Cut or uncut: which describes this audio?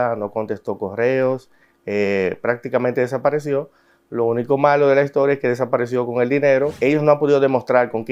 cut